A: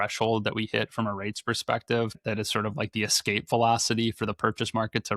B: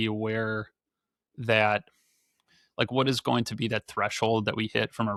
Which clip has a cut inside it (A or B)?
A